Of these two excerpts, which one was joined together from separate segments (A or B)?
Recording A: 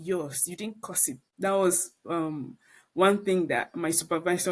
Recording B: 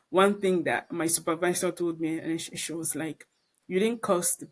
A